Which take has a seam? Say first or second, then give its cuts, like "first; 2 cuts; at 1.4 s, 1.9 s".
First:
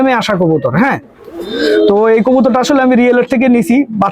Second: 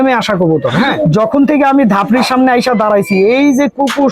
second; 1 cut; at 0.9 s